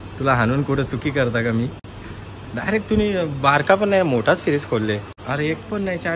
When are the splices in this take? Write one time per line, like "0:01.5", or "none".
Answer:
0:05.1